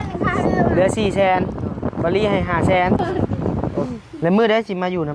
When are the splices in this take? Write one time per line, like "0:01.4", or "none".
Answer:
0:03.8